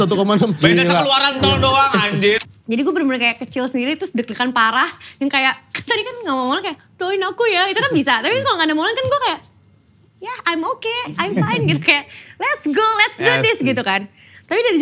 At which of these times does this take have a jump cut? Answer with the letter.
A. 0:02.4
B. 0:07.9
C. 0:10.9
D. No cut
A